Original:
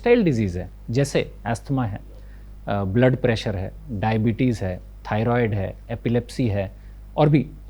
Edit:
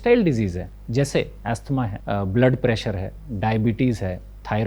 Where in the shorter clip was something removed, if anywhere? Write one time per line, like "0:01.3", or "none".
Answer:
0:02.0